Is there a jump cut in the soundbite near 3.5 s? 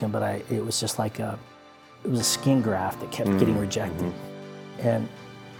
no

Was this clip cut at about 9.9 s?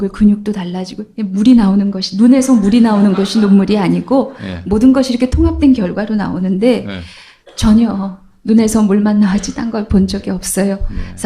no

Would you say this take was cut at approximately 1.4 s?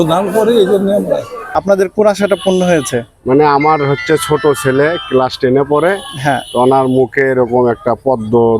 yes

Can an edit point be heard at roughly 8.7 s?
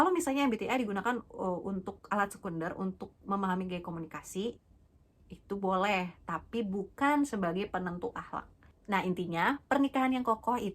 yes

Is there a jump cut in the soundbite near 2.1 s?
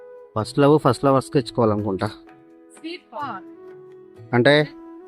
yes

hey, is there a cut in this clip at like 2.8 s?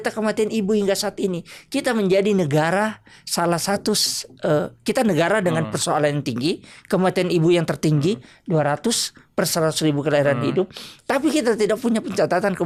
no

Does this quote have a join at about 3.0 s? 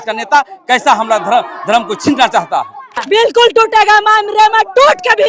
yes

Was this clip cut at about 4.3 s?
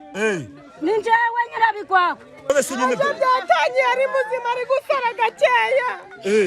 no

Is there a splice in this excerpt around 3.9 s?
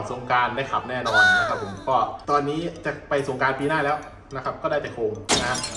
no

